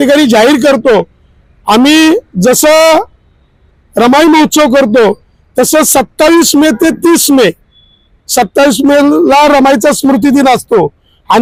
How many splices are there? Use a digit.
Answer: 0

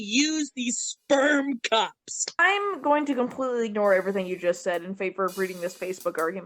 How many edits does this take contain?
1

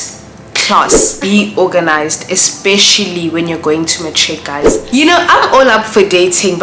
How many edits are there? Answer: 2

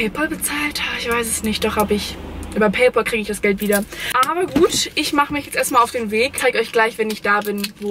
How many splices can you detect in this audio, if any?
0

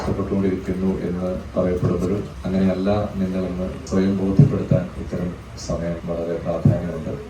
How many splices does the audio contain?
4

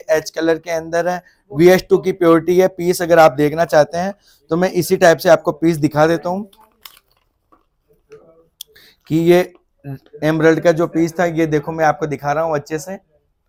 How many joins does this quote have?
0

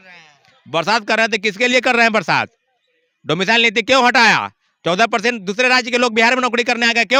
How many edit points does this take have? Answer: 0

